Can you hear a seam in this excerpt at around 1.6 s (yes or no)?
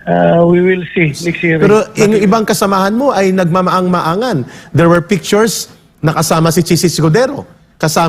yes